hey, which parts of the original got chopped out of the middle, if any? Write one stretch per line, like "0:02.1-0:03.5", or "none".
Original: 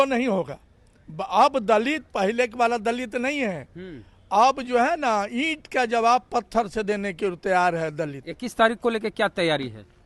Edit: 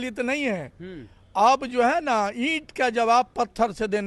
none